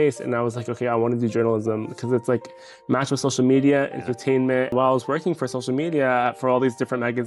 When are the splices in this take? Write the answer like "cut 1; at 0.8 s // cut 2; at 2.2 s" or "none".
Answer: cut 1; at 4.7 s